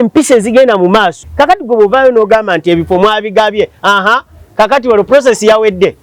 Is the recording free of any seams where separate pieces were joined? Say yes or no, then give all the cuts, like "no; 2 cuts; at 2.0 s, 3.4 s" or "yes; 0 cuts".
no; 1 cut; at 1.2 s